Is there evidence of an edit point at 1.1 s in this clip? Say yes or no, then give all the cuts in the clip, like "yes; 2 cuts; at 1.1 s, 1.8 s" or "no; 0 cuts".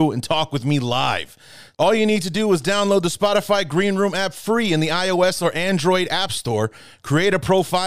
no; 0 cuts